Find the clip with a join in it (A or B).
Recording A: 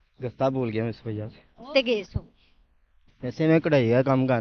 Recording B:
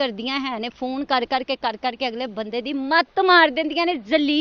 A